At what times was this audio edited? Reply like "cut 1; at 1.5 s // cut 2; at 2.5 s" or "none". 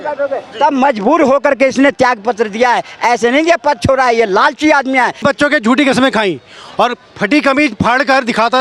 cut 1; at 5.2 s